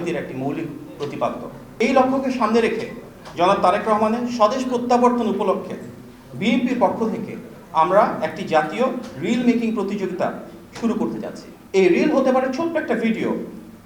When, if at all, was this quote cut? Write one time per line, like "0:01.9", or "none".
0:11.5